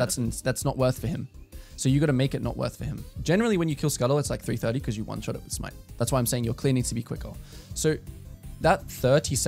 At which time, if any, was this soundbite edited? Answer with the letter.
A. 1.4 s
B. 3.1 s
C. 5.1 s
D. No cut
B